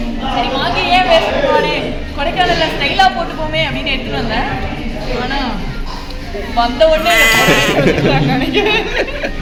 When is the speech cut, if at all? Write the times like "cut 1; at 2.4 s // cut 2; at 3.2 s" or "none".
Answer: none